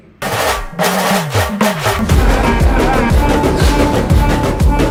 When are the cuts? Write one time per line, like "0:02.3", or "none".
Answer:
none